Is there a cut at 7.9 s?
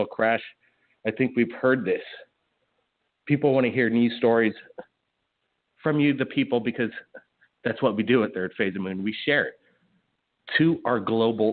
no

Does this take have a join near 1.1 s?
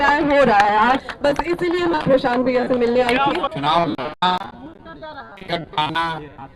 yes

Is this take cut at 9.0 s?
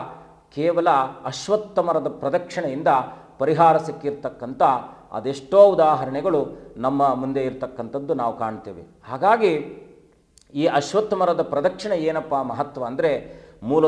no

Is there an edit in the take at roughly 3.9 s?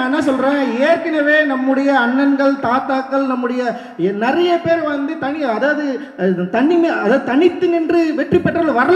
no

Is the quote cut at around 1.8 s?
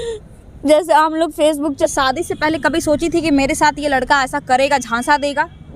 yes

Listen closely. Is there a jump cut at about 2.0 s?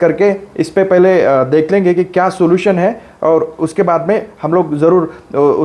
no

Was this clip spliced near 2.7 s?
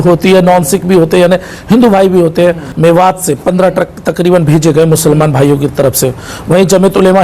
yes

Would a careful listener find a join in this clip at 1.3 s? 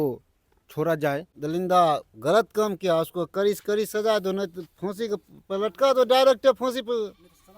yes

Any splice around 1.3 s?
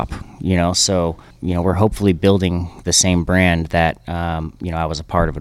yes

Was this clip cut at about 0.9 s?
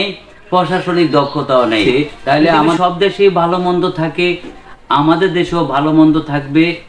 no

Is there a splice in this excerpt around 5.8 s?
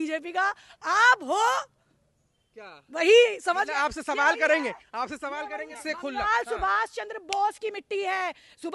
yes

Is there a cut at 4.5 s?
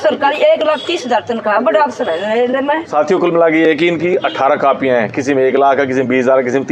no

